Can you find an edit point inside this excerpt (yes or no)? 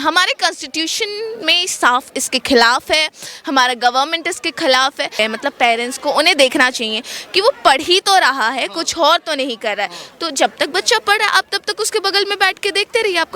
yes